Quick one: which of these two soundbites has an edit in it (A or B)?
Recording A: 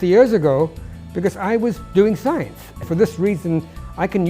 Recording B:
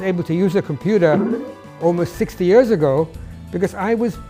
A